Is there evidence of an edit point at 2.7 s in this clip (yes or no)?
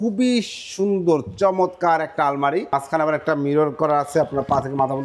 yes